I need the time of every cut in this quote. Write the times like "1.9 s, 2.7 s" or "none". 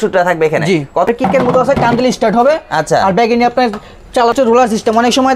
1.1 s, 4.3 s